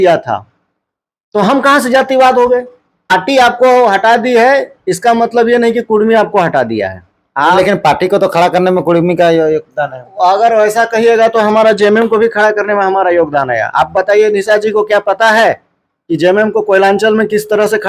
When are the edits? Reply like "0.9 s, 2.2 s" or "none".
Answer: 3.1 s